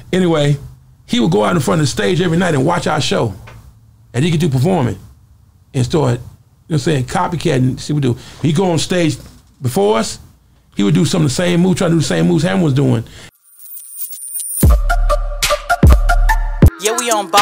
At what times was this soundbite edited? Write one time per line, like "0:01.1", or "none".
0:13.2